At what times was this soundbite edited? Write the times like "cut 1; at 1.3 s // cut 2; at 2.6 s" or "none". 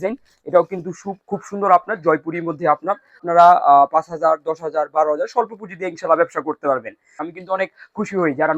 cut 1; at 3.2 s // cut 2; at 7.2 s